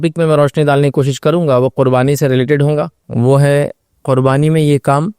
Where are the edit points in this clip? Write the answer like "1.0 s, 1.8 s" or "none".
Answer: 3.0 s